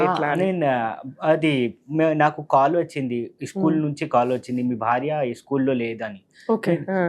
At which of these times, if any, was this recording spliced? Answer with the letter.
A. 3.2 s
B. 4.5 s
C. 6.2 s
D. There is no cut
D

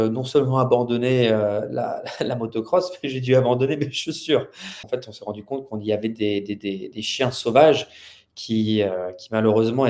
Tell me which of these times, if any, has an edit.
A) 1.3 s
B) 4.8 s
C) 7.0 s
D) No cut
B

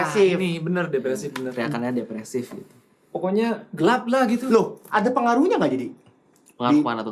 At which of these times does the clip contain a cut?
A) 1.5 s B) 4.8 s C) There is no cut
C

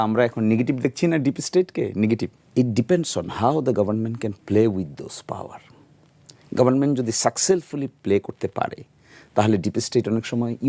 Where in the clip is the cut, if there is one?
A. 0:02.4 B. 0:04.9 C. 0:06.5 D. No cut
A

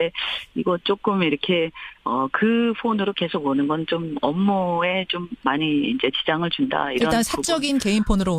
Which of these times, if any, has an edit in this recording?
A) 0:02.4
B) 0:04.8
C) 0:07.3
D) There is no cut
C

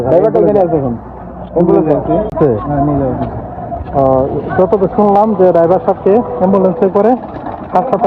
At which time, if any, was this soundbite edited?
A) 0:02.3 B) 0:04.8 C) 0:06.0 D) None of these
A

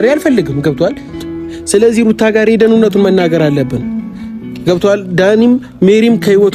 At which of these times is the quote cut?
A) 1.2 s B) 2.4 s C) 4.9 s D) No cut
A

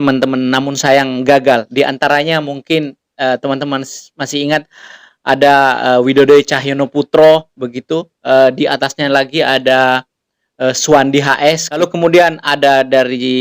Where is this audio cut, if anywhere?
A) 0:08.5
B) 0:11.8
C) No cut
B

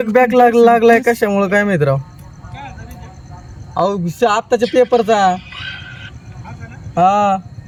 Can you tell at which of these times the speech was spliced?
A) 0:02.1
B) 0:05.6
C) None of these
C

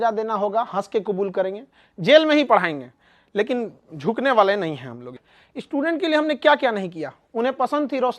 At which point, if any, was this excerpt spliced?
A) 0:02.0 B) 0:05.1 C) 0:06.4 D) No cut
B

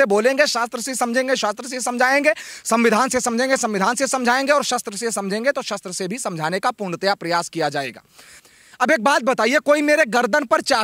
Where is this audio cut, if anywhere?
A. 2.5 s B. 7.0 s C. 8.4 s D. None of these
C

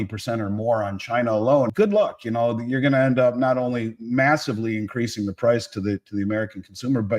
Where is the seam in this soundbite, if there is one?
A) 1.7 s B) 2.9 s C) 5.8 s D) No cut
A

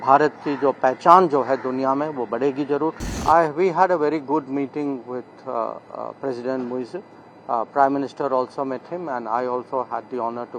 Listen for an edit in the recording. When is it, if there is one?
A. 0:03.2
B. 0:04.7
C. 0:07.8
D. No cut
A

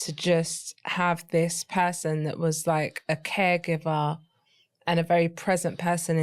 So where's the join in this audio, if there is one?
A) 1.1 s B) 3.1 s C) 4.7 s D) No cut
D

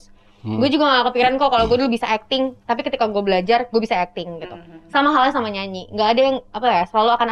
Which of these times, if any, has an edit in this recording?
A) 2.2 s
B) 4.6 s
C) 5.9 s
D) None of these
D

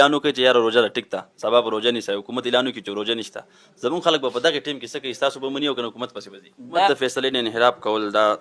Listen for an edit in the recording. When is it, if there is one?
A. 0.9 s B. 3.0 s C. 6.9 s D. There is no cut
C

